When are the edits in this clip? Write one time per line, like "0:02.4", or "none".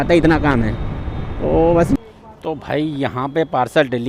0:02.0